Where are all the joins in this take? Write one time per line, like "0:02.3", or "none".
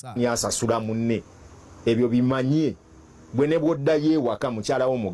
none